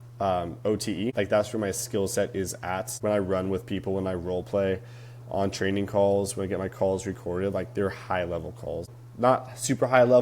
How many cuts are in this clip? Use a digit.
3